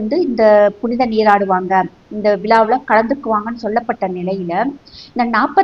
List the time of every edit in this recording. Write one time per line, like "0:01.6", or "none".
none

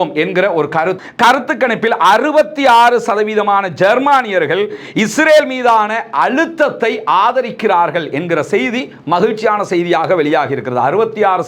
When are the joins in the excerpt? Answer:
0:01.0

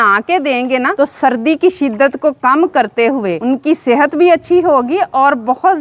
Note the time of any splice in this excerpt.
0:00.9
0:03.4

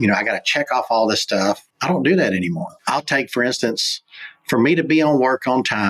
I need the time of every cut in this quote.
0:01.7
0:02.7

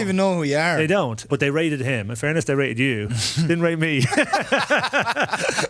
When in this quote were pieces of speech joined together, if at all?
0:01.2

